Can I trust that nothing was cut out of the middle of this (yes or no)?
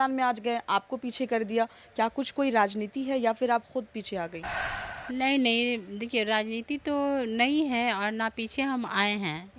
yes